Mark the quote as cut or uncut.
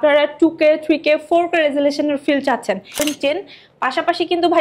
cut